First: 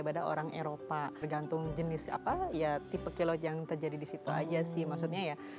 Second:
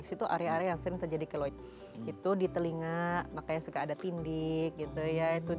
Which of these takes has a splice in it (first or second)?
first